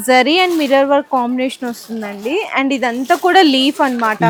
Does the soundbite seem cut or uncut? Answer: uncut